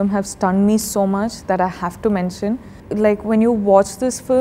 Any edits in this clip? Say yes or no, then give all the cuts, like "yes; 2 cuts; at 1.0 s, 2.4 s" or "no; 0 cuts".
yes; 1 cut; at 2.8 s